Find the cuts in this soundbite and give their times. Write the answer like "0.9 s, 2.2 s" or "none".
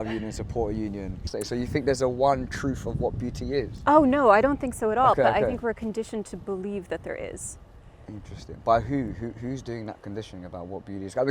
1.3 s